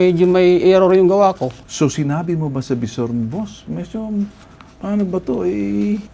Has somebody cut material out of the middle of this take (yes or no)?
no